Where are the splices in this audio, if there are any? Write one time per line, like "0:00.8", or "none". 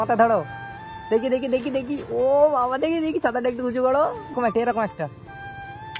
0:04.2